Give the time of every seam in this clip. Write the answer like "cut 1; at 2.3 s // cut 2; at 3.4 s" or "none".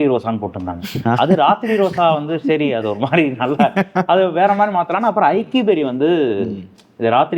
none